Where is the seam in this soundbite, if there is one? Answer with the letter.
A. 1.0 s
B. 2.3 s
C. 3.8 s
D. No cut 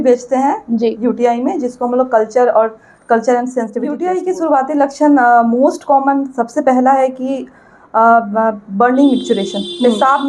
C